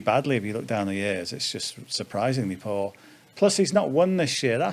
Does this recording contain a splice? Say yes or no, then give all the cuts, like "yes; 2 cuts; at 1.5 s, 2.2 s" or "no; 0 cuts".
no; 0 cuts